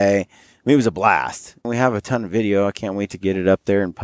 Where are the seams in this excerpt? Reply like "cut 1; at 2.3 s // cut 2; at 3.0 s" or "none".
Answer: cut 1; at 1.7 s